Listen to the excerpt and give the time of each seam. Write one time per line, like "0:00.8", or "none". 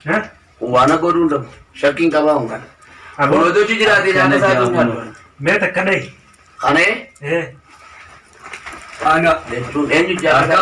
none